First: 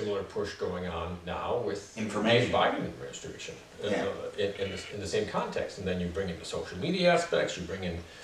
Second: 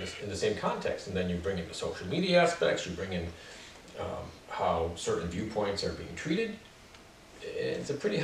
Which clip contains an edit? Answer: first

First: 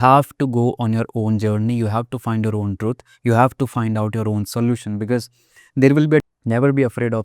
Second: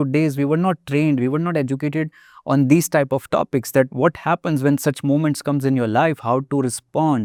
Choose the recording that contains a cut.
first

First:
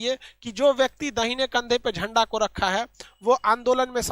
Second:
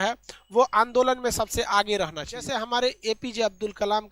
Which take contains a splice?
second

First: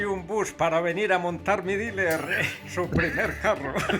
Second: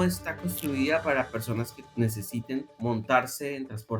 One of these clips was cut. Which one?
second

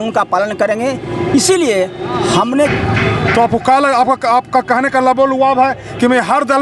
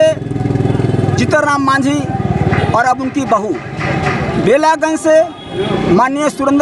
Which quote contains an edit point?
first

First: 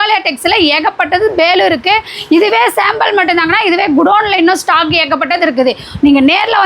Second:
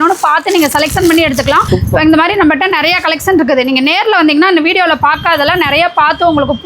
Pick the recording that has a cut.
second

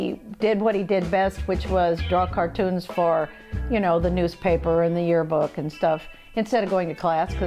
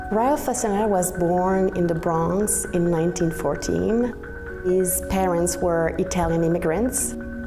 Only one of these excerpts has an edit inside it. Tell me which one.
second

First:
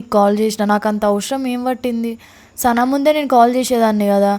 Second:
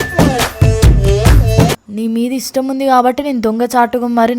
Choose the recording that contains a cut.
second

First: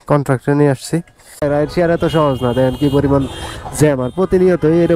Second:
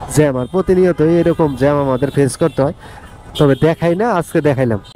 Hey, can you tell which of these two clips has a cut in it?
first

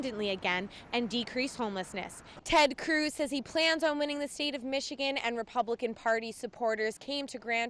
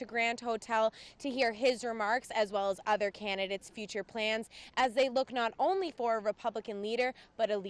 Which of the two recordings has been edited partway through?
first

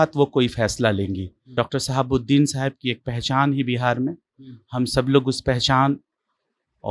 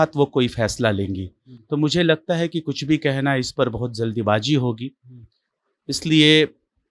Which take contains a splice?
first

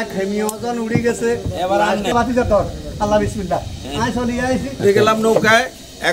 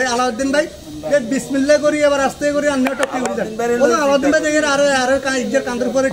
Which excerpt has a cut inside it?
first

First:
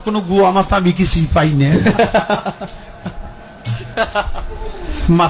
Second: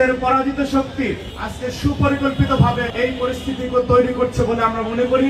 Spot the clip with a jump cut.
second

